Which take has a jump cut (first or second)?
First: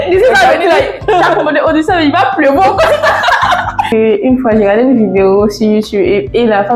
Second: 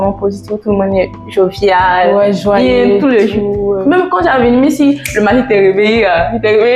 first